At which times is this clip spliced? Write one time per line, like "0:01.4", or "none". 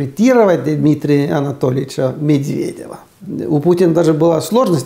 0:03.2